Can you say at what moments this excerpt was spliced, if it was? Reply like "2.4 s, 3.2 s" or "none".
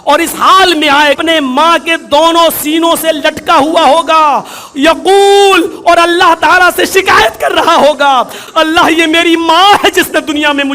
1.2 s, 8.4 s